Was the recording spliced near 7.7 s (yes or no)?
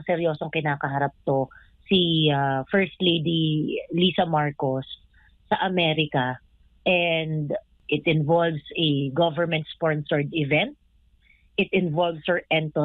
yes